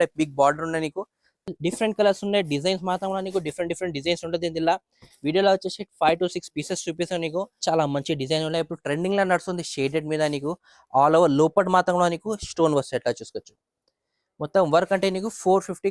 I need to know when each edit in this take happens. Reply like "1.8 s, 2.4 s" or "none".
1.5 s, 7.6 s